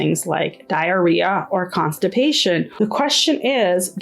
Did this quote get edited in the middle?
yes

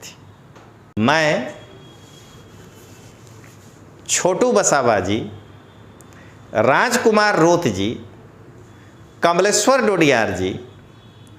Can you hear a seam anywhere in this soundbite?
yes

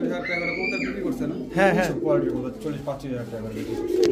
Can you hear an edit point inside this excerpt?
no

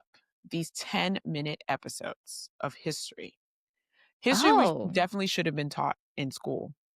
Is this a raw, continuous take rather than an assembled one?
yes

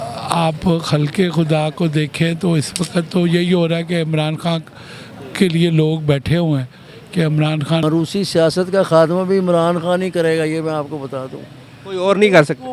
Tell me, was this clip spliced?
yes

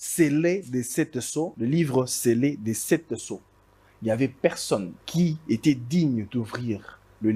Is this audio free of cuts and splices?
no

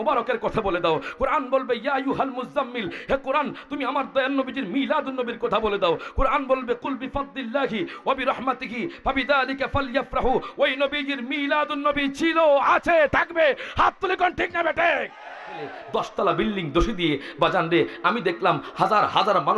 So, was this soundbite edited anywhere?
yes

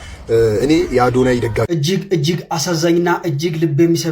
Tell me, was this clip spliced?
yes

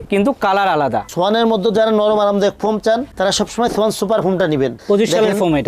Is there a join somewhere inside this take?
yes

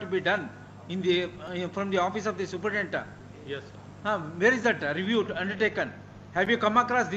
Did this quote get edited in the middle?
no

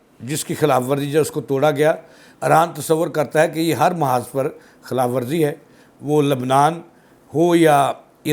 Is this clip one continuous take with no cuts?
yes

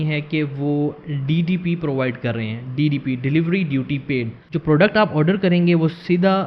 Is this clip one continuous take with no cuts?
no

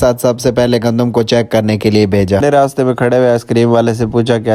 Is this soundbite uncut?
no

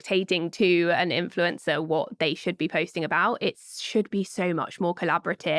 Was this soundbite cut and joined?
no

